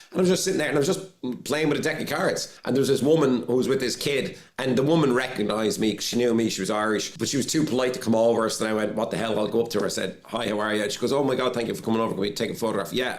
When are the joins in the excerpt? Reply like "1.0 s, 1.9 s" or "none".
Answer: 2.5 s, 7.2 s